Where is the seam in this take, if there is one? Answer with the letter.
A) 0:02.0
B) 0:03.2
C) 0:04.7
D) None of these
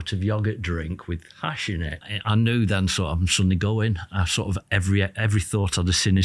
A